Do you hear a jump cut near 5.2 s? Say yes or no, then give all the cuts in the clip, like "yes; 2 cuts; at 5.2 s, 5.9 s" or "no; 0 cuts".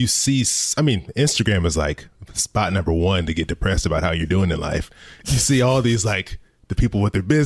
yes; 1 cut; at 5.2 s